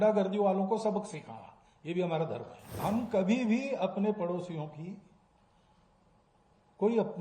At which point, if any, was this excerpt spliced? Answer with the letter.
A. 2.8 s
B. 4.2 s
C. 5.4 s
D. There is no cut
A